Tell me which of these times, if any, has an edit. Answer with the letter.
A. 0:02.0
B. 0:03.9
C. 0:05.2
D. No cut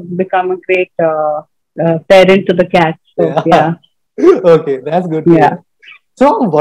D